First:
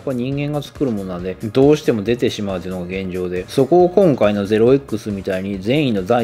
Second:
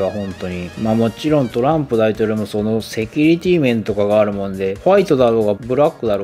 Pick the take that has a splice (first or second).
second